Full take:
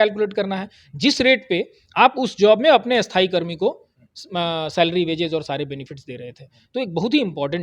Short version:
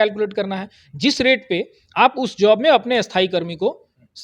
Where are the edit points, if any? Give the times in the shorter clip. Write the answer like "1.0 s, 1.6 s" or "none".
none